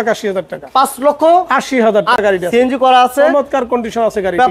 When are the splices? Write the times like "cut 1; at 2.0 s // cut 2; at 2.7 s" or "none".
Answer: cut 1; at 2.2 s